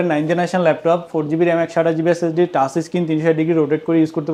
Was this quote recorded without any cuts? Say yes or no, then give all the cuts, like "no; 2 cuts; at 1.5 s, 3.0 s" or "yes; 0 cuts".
yes; 0 cuts